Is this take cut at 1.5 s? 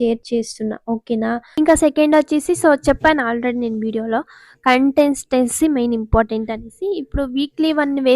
yes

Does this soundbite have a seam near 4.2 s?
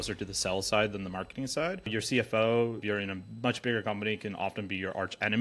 no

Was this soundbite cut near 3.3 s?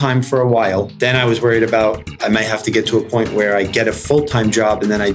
no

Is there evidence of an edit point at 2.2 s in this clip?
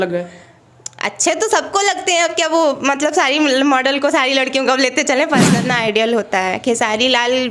no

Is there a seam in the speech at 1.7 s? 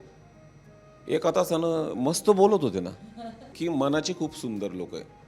no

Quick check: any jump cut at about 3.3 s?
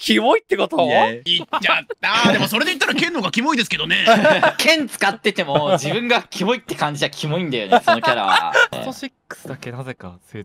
no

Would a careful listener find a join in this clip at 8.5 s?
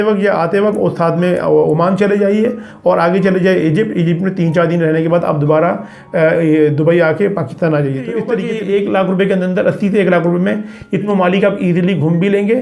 yes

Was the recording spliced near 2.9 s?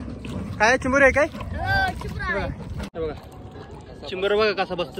yes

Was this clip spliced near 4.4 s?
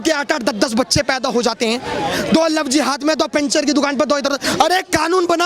yes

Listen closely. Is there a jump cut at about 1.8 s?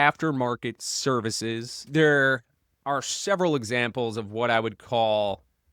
yes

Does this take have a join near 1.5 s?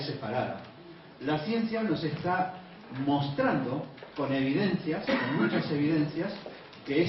yes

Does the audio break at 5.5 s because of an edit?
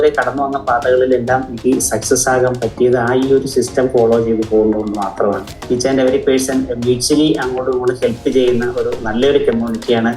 yes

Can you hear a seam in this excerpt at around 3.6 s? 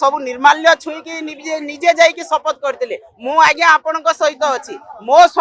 no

